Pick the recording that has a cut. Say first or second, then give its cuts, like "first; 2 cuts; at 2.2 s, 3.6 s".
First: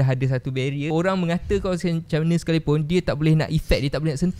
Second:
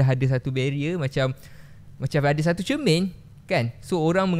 first; 1 cut; at 0.9 s